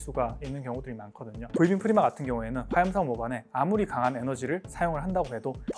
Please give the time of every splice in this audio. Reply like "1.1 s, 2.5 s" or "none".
1.5 s